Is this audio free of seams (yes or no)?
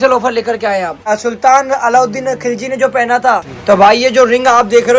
no